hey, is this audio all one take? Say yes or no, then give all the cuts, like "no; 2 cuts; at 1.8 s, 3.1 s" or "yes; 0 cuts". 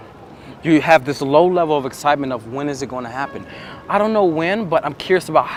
yes; 0 cuts